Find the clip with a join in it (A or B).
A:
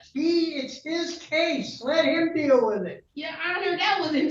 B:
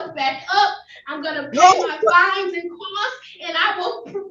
A